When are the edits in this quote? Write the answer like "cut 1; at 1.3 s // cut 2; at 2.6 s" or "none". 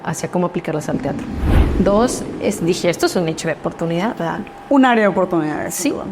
cut 1; at 1.5 s

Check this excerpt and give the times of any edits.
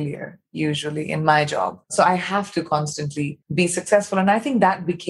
cut 1; at 1.8 s // cut 2; at 3.4 s

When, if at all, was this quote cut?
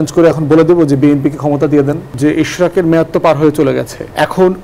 cut 1; at 2.1 s

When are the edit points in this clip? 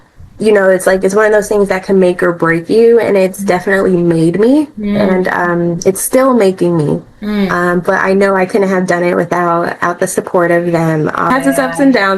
cut 1; at 11.3 s

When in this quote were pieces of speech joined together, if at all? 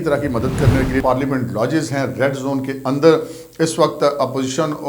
cut 1; at 1.0 s

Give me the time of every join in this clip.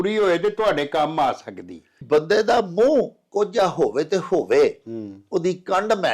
cut 1; at 2.0 s

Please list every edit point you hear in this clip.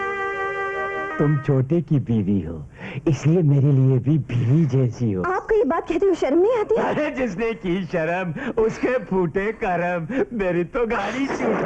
cut 1; at 1.1 s

